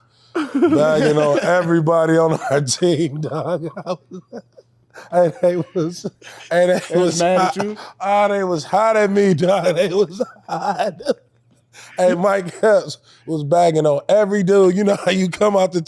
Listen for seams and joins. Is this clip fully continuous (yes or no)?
yes